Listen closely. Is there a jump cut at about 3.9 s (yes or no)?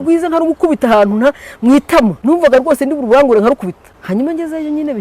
yes